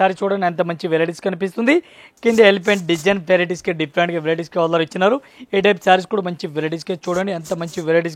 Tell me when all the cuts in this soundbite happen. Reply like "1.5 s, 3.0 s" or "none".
none

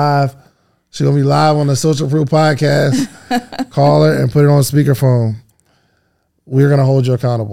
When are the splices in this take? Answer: none

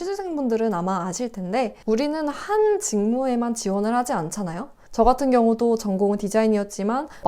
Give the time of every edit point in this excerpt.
1.8 s

